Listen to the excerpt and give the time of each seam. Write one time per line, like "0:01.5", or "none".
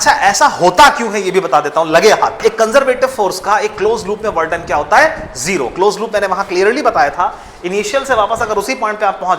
0:02.4